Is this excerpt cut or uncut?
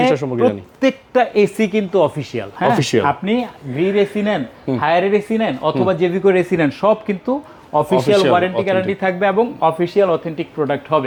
uncut